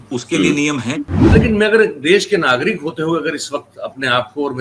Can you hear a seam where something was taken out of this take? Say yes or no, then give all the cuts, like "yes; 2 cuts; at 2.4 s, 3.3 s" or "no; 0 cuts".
yes; 1 cut; at 1.3 s